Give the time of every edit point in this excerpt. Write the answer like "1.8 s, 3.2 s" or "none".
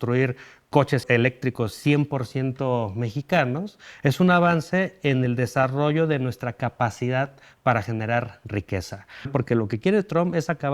1.0 s, 9.3 s